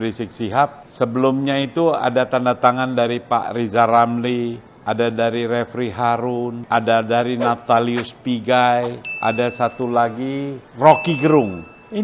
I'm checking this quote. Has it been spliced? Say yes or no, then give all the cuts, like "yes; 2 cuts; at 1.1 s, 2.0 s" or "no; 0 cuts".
no; 0 cuts